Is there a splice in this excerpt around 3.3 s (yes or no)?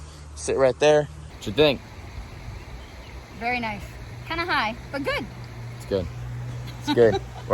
no